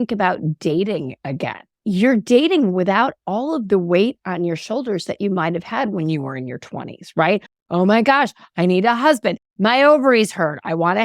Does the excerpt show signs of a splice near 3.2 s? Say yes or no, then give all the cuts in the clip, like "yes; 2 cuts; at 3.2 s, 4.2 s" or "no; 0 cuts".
no; 1 cut; at 1.7 s